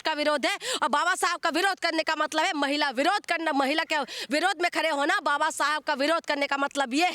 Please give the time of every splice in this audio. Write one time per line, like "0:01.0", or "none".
none